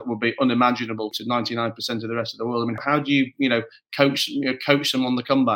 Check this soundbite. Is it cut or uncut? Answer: cut